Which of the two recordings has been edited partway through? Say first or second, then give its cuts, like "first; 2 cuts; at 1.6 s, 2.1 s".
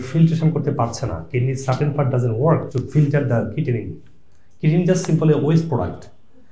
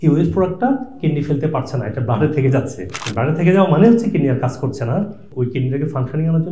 second; 1 cut; at 5.3 s